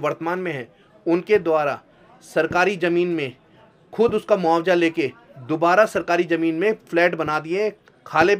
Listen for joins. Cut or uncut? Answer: uncut